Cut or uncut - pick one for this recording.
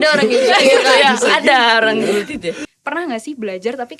cut